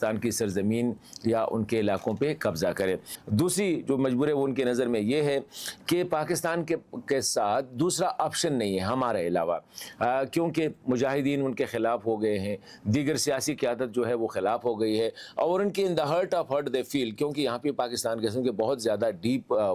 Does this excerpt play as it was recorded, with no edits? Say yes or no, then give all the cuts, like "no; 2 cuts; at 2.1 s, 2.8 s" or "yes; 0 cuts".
no; 1 cut; at 3.1 s